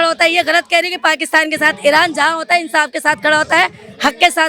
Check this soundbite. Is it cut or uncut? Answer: uncut